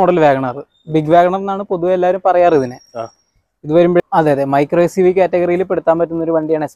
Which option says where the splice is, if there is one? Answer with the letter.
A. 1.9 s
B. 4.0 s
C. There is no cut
B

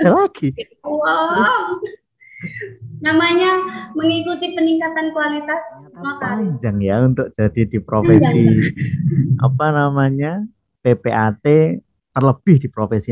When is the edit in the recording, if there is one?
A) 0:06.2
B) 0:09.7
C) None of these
A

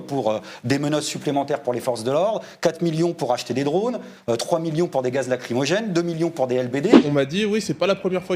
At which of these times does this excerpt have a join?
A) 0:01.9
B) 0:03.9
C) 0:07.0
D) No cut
C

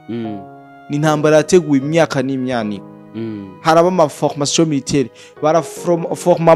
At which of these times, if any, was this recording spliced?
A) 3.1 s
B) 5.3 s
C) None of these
C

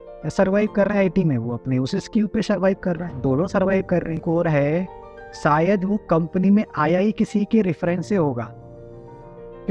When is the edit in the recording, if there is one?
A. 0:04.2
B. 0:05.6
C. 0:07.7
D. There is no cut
A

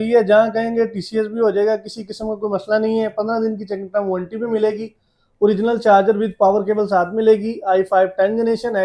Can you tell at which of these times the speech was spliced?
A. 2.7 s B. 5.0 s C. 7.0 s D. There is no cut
D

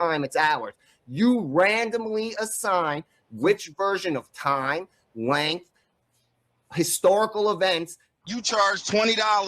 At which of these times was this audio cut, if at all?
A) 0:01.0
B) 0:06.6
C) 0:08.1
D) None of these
C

